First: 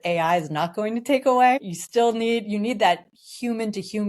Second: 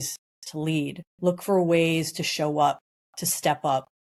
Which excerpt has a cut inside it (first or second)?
first